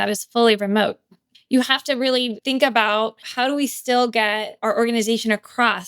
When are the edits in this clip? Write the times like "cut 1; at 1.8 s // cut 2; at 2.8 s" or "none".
cut 1; at 1.2 s // cut 2; at 2.4 s // cut 3; at 3.2 s // cut 4; at 4.5 s